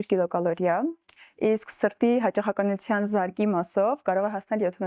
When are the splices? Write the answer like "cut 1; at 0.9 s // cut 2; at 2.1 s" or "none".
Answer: none